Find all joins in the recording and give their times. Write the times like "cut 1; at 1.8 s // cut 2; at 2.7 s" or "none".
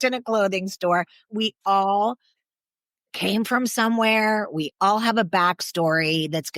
cut 1; at 1.2 s